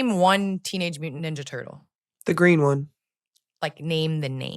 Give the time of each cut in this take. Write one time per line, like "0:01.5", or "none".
0:01.1